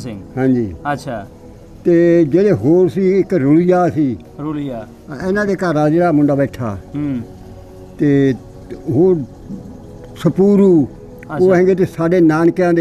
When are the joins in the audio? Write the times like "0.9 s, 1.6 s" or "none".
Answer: none

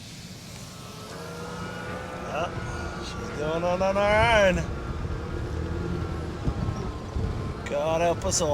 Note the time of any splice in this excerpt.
none

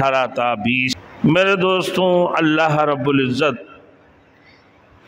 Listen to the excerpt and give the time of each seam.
1.0 s

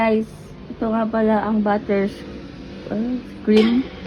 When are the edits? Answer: none

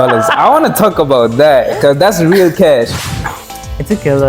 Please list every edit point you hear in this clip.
3.2 s

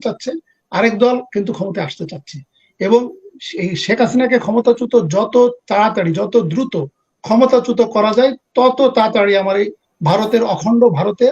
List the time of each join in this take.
none

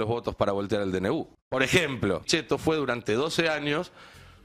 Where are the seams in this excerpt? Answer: 1.4 s, 2.3 s

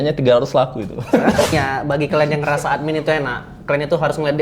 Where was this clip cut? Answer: 1.5 s

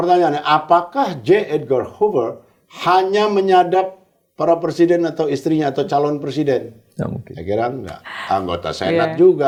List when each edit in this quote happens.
none

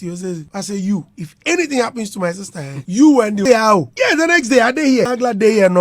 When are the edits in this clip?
3.4 s, 5.1 s

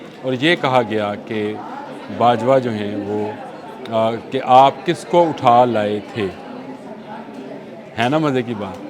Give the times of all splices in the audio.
none

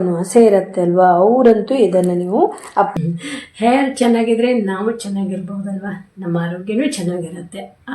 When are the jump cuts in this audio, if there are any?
2.9 s

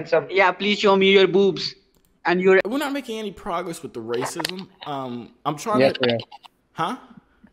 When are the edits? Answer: 2.6 s

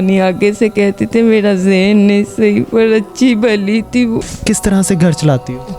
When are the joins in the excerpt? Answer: 4.3 s

